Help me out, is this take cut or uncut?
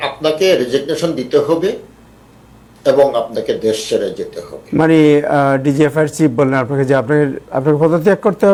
uncut